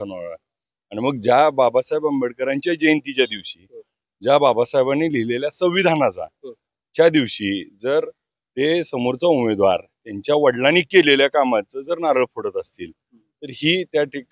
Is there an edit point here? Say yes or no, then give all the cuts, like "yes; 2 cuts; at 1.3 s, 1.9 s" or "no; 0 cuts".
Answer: no; 0 cuts